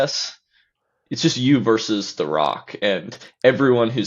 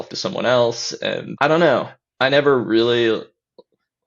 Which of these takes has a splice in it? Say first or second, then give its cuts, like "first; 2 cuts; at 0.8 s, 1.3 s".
second; 1 cut; at 1.3 s